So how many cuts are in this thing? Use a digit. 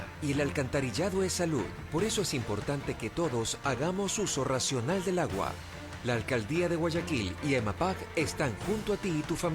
0